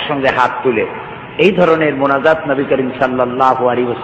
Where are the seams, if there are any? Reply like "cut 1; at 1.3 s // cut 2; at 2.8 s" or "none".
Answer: none